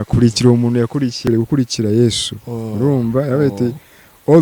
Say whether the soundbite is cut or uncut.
cut